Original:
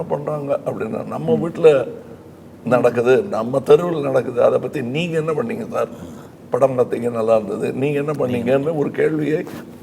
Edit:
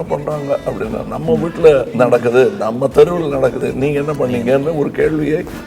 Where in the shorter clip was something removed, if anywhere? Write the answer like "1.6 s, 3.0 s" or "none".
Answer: 1.9 s, 3.6 s